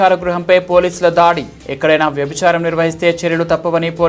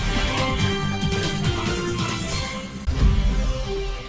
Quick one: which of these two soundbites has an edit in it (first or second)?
second